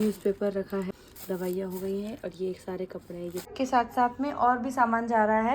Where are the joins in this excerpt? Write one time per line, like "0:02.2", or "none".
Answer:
0:00.9
0:03.5